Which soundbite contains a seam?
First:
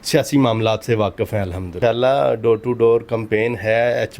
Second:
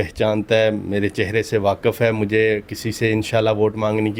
first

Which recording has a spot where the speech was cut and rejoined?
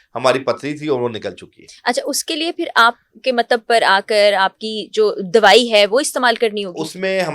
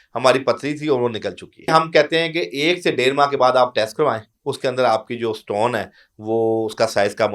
second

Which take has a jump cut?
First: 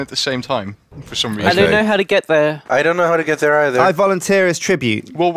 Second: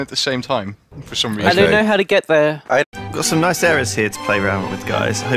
first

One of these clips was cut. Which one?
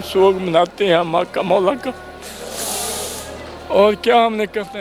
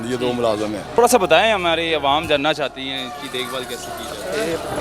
second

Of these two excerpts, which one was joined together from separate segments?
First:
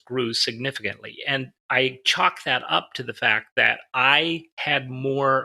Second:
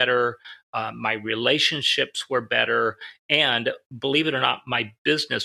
first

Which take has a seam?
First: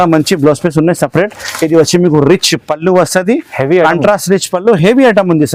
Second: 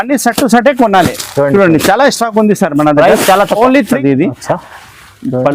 second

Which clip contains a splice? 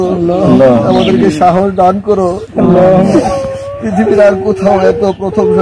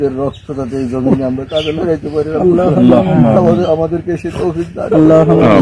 first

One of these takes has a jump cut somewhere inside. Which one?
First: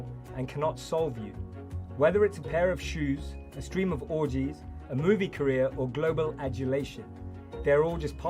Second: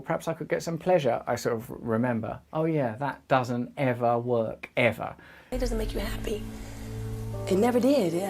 second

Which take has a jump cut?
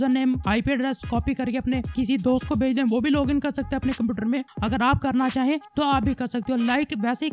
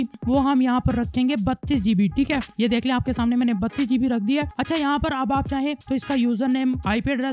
second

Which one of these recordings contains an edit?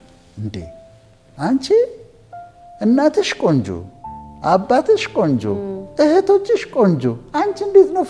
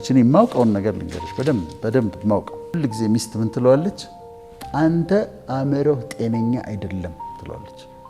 second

